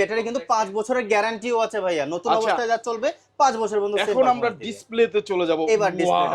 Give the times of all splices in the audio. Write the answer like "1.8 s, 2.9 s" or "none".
none

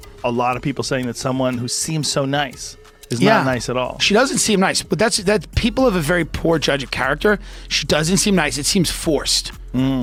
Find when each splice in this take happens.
none

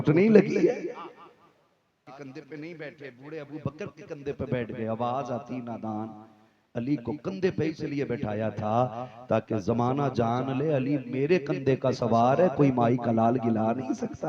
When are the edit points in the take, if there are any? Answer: 2.1 s

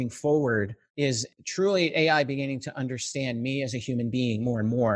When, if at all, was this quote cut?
1.1 s

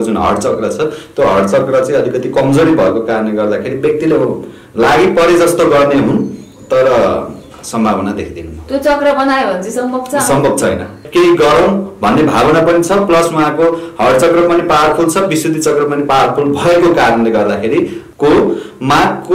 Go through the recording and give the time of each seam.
11.0 s, 18.0 s

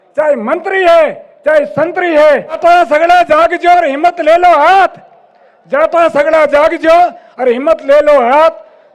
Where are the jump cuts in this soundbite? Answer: 2.6 s

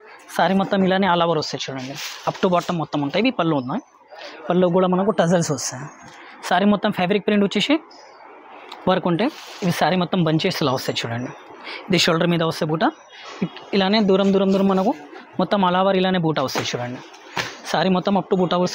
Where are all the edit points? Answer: none

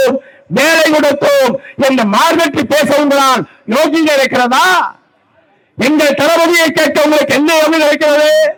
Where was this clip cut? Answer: none

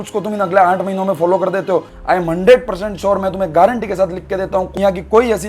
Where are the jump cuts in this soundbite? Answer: 1.9 s

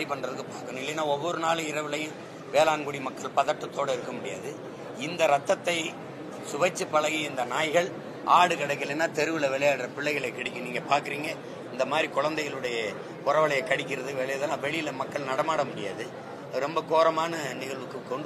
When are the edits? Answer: none

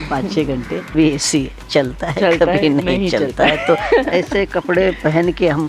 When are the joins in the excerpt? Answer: 0.9 s

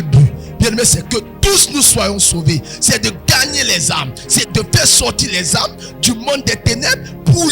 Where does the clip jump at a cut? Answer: 4.5 s

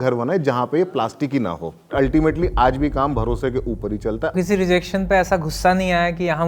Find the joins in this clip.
1.9 s, 4.3 s

